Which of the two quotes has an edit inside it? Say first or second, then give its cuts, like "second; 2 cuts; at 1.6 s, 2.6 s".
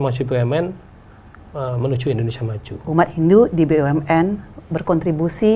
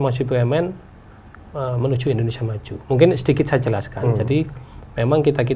first; 1 cut; at 2.8 s